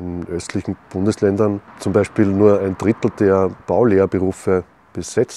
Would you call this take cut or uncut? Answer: cut